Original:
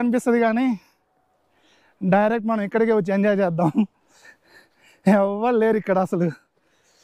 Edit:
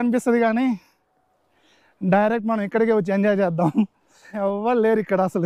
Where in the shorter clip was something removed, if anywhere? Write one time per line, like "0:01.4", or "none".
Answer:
0:04.4

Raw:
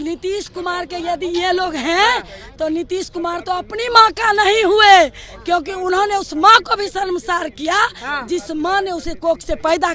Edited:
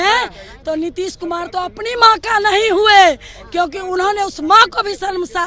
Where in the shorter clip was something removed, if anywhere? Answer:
none

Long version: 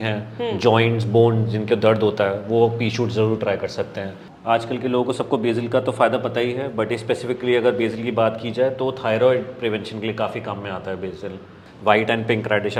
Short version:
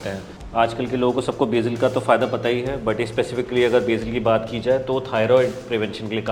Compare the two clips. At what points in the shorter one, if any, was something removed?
none

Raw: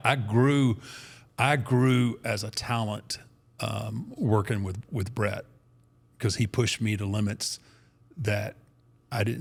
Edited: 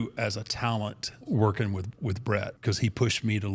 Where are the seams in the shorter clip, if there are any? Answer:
0:01.1
0:02.5

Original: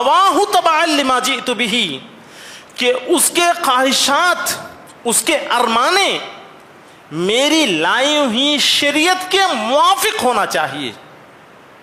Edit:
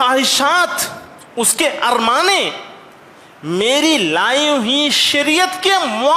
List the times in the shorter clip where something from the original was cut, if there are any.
none

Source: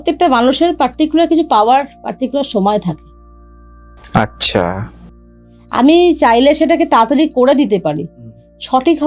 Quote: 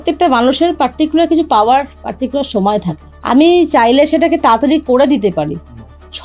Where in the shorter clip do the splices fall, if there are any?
0:03.1

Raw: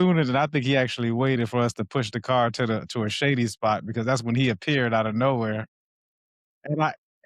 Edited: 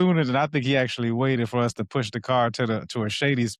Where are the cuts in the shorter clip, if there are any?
none

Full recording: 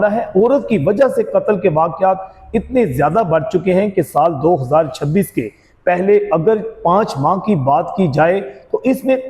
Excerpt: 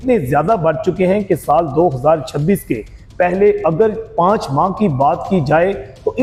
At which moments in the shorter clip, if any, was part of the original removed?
none

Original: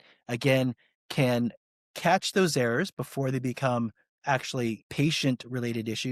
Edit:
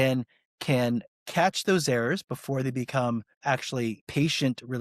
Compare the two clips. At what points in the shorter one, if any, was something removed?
0:01.2
0:03.6

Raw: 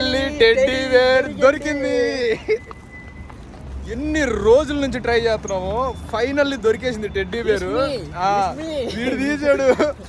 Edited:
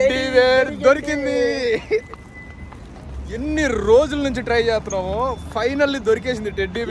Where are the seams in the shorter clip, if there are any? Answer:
none

